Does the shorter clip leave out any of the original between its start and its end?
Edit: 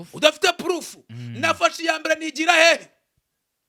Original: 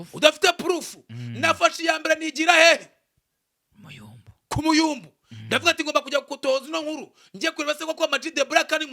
no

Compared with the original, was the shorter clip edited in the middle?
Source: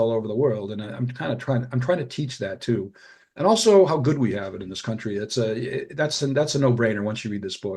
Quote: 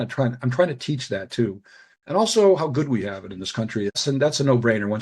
yes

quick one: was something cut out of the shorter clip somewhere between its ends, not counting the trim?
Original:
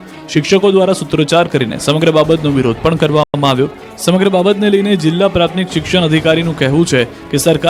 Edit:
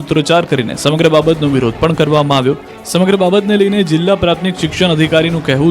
yes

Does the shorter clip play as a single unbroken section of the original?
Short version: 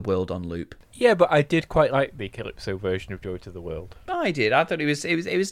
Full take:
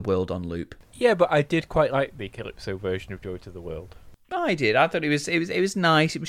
no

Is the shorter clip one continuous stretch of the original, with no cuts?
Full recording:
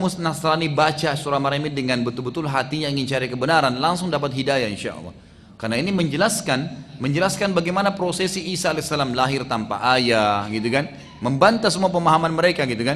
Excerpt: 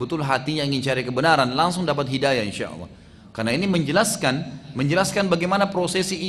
yes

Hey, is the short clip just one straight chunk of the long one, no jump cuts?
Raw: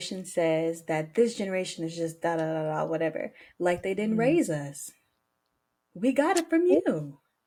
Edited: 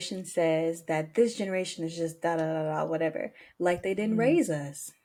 yes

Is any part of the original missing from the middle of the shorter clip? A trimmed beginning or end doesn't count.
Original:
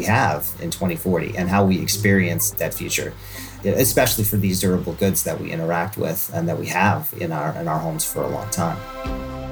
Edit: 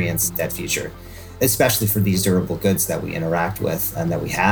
yes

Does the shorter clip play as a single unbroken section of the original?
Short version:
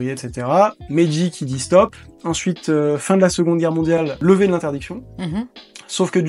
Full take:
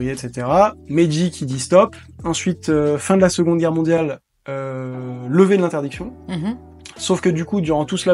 no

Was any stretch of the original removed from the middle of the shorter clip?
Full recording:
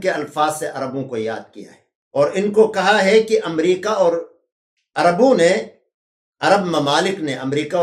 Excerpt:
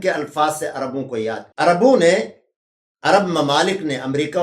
yes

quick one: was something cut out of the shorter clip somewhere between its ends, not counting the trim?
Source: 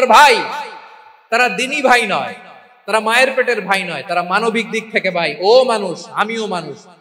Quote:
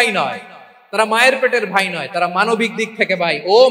no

